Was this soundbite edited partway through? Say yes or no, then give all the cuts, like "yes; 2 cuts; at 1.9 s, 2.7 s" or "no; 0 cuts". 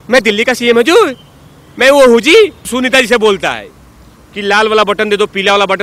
yes; 1 cut; at 2.7 s